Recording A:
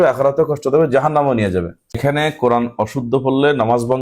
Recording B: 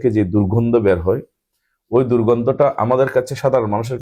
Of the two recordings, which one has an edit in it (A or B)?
A